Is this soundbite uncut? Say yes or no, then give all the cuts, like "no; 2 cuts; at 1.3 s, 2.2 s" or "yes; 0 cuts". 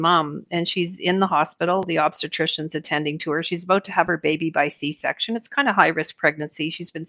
yes; 0 cuts